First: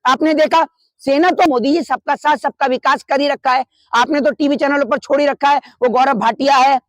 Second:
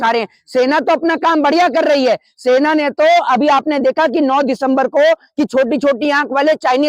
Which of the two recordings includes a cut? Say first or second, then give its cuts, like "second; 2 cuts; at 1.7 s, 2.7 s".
first; 1 cut; at 1.5 s